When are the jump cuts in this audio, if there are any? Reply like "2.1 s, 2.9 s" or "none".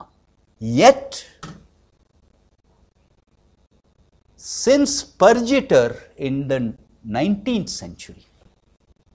none